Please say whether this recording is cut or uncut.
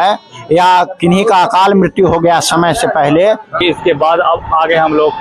cut